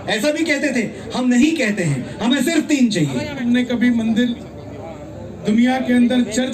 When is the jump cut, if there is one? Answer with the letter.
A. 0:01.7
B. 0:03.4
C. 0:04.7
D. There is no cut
B